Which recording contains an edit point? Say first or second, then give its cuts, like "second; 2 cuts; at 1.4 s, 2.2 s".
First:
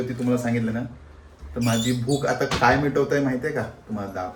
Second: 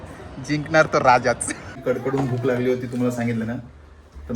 second; 1 cut; at 1.8 s